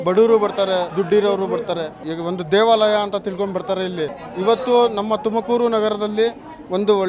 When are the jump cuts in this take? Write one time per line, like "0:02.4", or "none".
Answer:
0:00.9
0:02.0
0:04.2